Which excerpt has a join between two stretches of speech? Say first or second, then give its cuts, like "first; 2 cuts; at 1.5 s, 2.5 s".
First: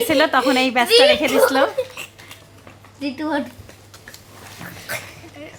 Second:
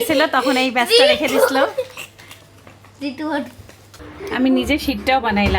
second; 1 cut; at 4.1 s